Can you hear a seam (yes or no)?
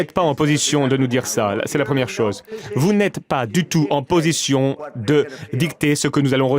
yes